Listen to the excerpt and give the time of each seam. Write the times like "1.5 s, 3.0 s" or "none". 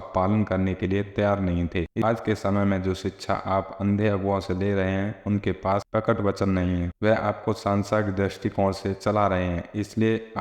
2.0 s